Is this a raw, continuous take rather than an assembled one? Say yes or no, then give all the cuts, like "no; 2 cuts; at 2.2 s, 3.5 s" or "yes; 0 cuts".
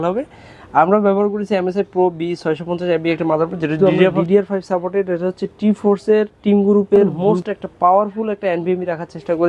no; 2 cuts; at 3.8 s, 7.1 s